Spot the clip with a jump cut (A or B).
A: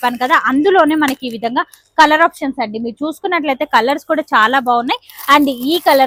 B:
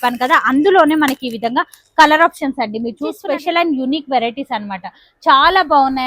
B